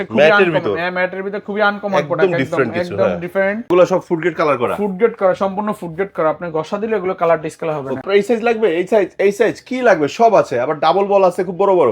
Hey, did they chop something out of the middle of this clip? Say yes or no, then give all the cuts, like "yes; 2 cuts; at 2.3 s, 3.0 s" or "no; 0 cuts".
yes; 2 cuts; at 3.7 s, 8.0 s